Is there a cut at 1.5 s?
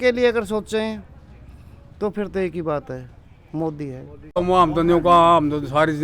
no; 1 cut; at 4.3 s

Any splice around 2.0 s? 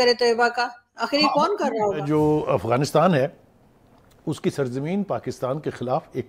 yes; 1 cut; at 2.0 s

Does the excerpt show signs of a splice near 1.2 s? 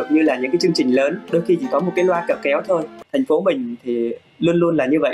no; 1 cut; at 2.9 s

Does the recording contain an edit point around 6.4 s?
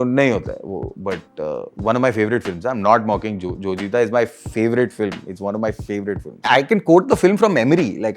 yes; 1 cut; at 6.4 s

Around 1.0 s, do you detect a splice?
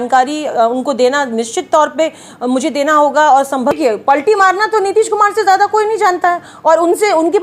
no; 1 cut; at 3.8 s

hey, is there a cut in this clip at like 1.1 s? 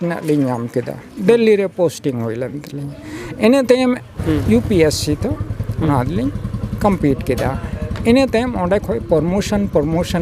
no; 1 cut; at 4.1 s

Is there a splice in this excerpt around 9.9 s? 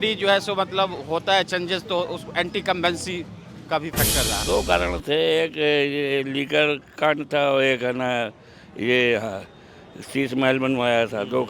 no; 1 cut; at 4.4 s

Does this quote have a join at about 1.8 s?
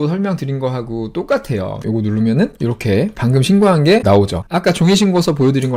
yes; 1 cut; at 1.8 s

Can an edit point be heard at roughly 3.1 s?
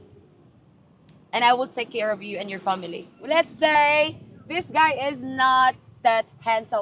yes; 1 cut; at 3.1 s

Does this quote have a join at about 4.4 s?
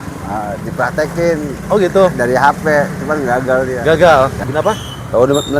yes; 1 cut; at 4.4 s

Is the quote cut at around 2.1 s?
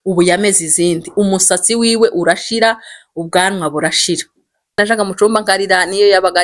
no; 1 cut; at 4.8 s

